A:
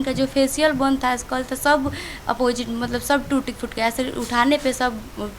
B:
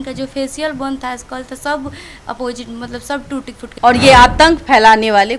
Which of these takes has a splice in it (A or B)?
B